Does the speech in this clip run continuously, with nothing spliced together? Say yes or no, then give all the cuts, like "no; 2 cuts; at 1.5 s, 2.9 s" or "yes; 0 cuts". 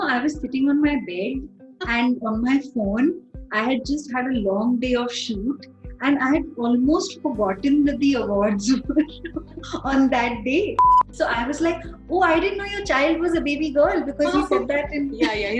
no; 1 cut; at 11.0 s